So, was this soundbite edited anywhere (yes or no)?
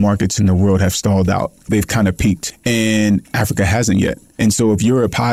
yes